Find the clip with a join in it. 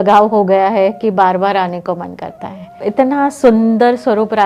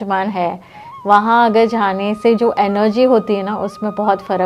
first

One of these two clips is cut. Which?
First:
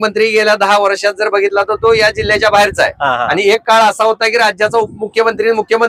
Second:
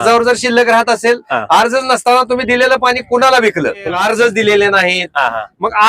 second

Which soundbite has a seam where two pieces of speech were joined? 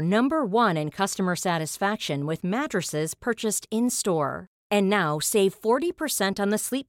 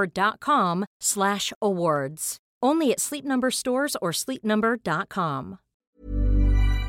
second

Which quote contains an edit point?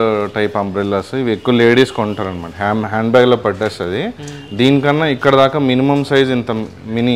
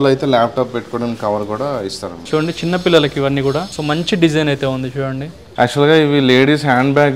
second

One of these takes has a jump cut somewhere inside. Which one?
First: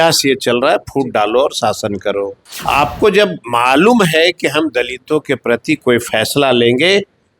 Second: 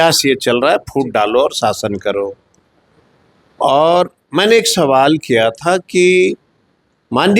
first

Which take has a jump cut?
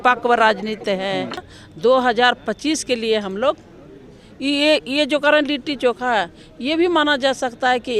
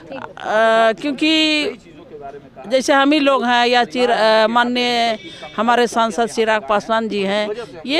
first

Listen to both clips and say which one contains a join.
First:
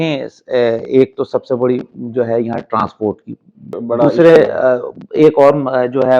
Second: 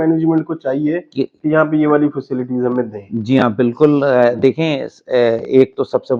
first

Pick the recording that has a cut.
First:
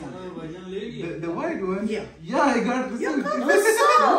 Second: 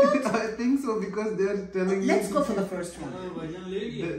first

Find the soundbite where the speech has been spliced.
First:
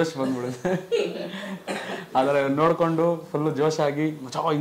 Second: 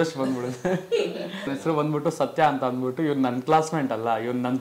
second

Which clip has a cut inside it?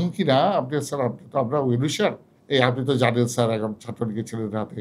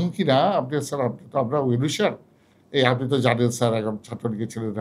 first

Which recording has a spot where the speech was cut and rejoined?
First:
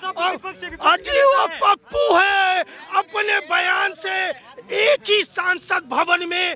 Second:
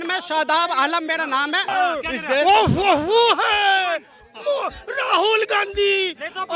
second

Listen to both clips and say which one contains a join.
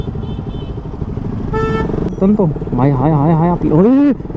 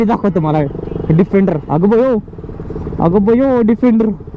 first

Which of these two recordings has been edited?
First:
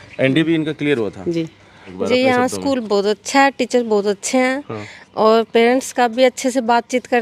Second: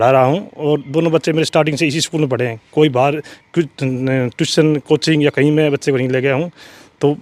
first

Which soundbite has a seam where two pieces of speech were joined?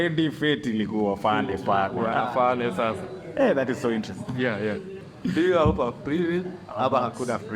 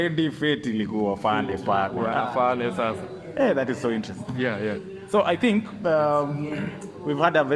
first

